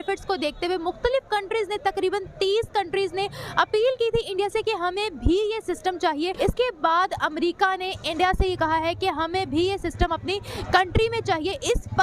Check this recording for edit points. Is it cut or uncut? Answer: cut